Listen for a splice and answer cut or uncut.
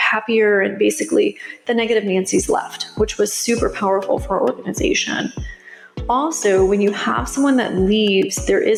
uncut